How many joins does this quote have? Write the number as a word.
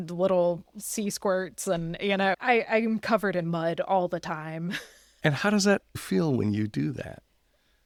zero